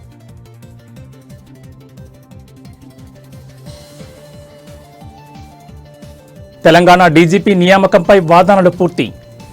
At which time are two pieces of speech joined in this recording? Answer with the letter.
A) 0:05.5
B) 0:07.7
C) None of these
A